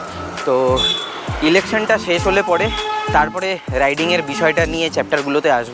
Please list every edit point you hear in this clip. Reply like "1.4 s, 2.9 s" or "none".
none